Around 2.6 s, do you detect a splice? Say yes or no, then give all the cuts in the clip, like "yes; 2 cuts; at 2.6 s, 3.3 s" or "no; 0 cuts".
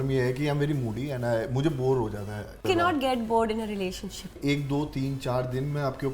yes; 2 cuts; at 2.6 s, 4.3 s